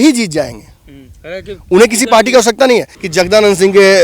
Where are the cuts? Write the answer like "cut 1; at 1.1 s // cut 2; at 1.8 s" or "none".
cut 1; at 3.0 s